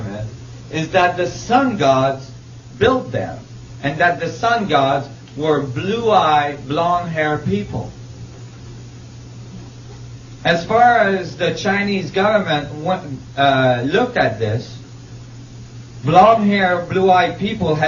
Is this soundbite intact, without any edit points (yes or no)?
no